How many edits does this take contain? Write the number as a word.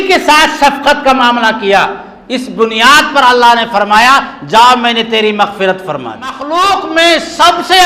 one